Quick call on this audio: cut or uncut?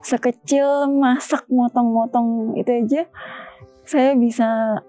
uncut